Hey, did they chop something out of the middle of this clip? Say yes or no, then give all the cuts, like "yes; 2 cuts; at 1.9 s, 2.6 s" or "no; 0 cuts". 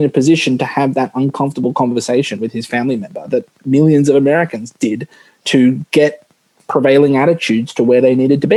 no; 0 cuts